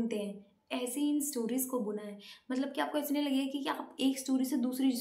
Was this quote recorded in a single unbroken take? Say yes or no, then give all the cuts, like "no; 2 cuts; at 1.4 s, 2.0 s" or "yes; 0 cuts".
yes; 0 cuts